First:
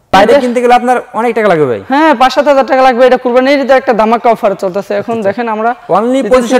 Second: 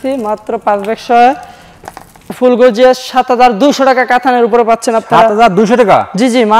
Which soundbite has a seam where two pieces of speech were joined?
second; 1 cut; at 2.4 s

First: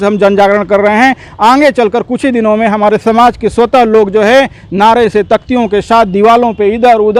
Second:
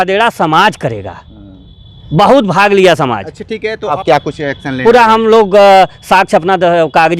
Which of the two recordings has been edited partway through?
second; 1 cut; at 3.9 s

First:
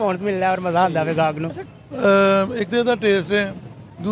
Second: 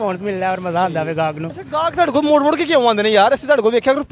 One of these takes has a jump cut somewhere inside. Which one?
first; 1 cut; at 1.6 s

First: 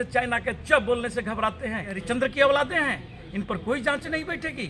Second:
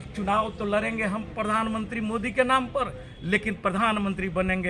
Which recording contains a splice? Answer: first; 1 cut; at 2.0 s

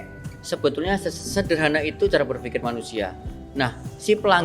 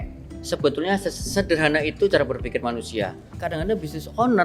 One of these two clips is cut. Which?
second; 1 cut; at 3.4 s

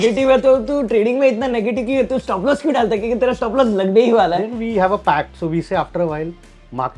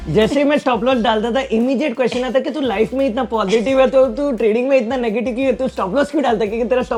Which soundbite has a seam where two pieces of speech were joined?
first; 1 cut; at 4.5 s

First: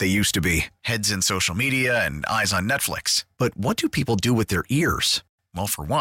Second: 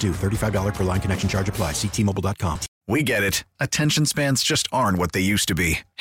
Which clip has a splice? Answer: second; 1 cut; at 2.7 s

